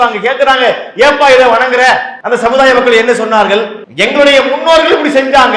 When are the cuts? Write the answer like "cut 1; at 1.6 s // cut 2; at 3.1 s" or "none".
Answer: cut 1; at 2.1 s // cut 2; at 3.8 s